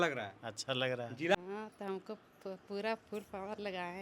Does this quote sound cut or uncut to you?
cut